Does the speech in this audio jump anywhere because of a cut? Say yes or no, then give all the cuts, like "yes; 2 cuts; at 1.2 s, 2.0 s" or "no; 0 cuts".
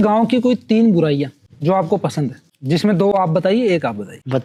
no; 0 cuts